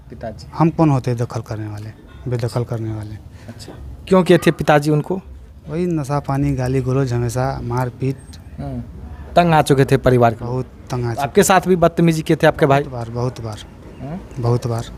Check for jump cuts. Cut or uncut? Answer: uncut